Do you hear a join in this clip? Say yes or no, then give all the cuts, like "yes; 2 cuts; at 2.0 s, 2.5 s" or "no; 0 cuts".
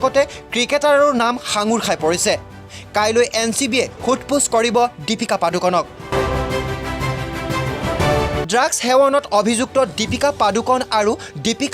yes; 2 cuts; at 6.4 s, 8.5 s